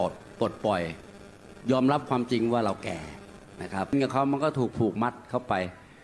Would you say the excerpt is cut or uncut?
cut